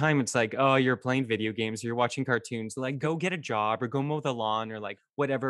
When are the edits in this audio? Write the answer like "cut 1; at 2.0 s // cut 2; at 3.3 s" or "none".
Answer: cut 1; at 3.0 s